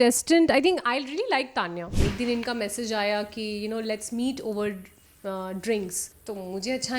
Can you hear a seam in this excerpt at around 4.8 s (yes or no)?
no